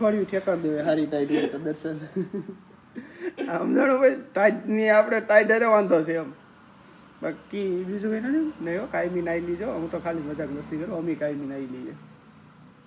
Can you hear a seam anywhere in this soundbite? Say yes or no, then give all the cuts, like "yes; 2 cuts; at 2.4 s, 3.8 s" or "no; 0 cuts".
no; 0 cuts